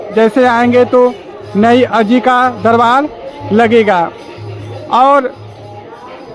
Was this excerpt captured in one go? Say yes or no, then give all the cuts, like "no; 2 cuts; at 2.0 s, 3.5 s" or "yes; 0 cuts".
yes; 0 cuts